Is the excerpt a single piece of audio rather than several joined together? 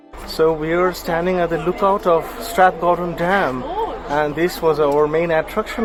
yes; 0 cuts

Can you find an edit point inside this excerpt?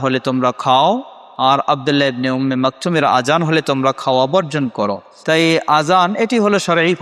no; 0 cuts

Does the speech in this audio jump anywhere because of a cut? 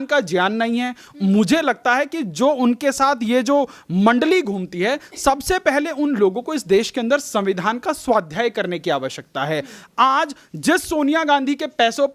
no; 0 cuts

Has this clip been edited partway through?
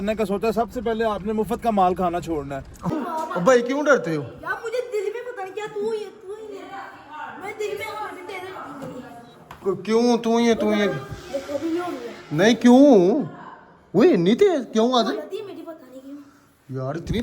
yes; 1 cut; at 2.9 s

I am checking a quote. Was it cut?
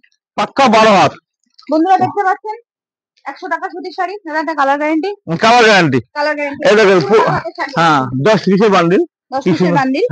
no; 0 cuts

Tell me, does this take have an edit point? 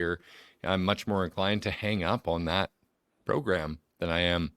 no; 0 cuts

